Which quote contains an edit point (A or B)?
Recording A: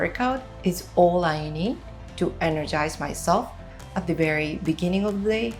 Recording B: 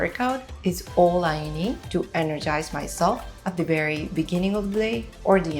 B